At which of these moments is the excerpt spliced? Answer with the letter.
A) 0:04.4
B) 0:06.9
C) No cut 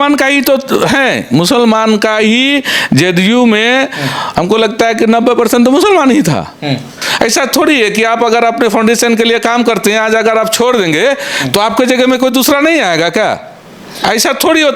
B